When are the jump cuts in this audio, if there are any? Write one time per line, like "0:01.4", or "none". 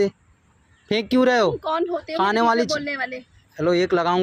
none